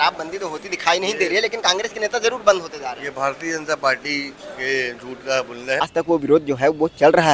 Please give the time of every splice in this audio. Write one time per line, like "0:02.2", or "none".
0:05.9